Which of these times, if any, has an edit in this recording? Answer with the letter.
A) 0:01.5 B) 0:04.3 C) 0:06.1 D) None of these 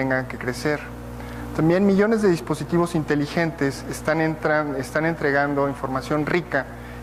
D